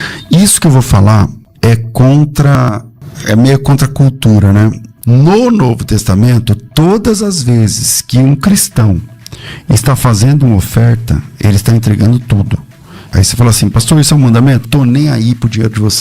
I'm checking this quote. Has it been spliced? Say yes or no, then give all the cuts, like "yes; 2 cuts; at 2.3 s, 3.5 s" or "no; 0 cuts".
yes; 4 cuts; at 1.4 s, 2.5 s, 4.9 s, 14.6 s